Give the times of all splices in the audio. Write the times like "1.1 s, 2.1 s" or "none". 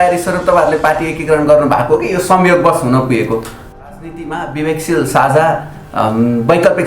3.8 s